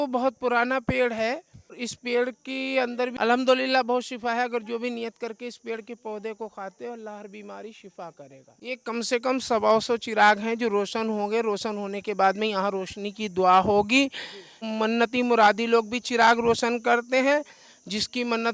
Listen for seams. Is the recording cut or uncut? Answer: cut